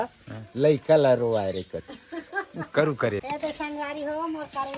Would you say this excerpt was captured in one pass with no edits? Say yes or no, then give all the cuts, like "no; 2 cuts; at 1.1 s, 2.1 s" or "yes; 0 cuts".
no; 1 cut; at 3.2 s